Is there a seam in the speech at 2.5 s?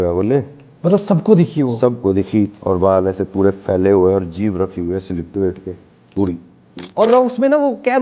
yes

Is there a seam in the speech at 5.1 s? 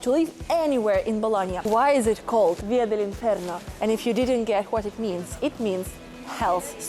no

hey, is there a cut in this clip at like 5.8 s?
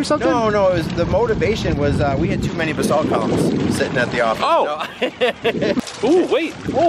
yes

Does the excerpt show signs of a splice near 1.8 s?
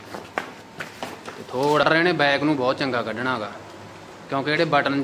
yes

